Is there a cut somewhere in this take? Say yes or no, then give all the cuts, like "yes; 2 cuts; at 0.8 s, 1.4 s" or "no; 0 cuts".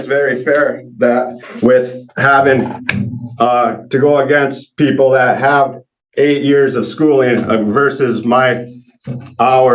no; 0 cuts